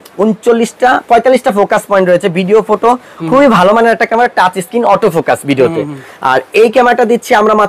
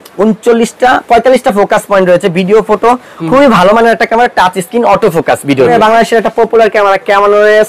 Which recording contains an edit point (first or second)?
second